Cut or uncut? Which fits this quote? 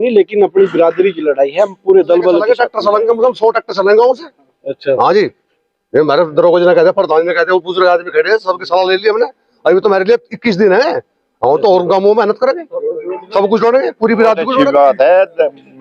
cut